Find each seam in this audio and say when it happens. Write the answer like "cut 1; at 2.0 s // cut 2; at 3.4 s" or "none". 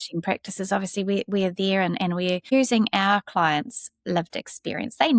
cut 1; at 2.5 s